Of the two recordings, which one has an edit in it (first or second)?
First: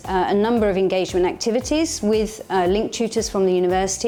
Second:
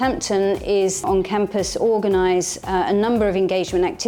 second